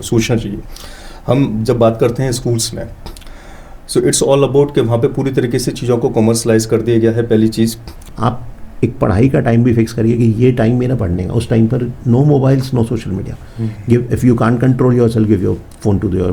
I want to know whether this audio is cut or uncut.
cut